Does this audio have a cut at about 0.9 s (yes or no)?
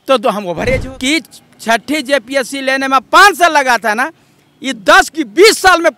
yes